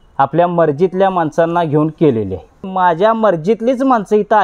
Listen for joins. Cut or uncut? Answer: cut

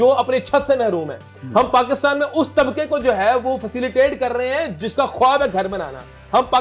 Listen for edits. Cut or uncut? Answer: uncut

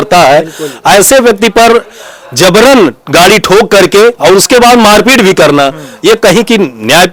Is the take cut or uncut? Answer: uncut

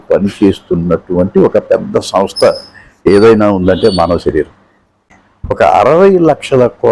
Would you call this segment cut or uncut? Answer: uncut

